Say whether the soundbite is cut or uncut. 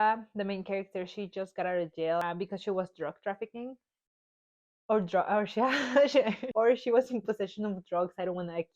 cut